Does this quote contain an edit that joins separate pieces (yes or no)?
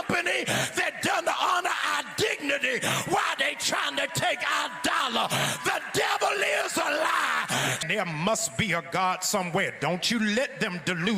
no